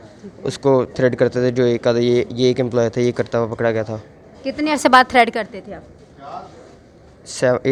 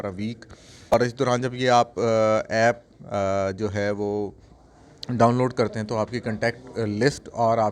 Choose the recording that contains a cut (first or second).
second